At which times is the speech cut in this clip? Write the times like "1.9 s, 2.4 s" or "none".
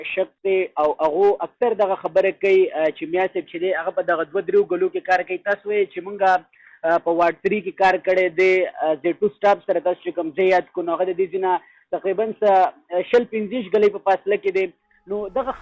none